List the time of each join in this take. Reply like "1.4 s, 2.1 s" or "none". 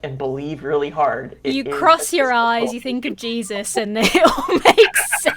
none

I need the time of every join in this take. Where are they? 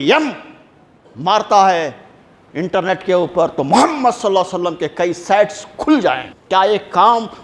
6.3 s

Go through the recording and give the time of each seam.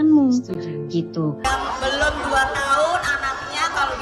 1.4 s

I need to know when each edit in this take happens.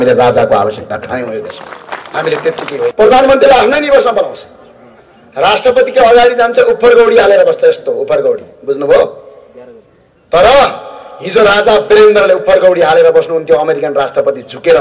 2.9 s

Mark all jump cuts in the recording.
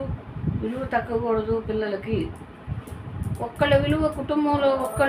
none

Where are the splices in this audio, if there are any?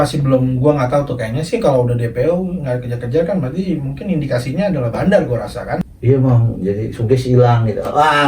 5.8 s

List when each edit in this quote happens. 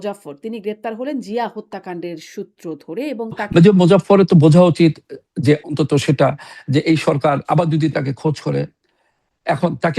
3.4 s

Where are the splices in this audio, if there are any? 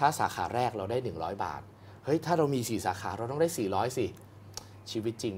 none

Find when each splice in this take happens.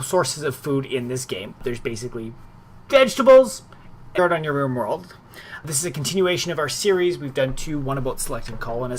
none

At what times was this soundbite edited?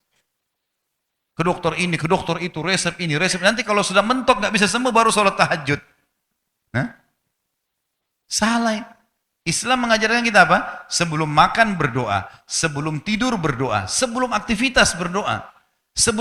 none

